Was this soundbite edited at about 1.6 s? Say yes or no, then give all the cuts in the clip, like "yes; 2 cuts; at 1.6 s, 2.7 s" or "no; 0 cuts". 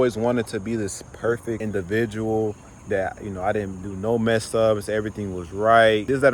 no; 0 cuts